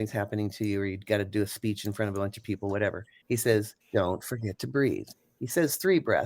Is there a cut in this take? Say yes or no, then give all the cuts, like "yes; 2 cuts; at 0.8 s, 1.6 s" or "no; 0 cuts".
yes; 3 cuts; at 3.1 s, 3.8 s, 5.1 s